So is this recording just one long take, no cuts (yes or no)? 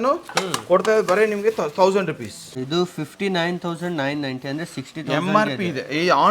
no